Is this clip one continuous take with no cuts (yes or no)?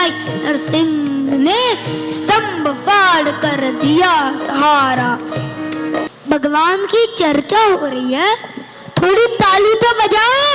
no